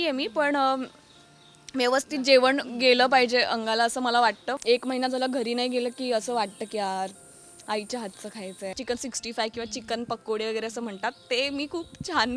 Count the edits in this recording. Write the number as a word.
two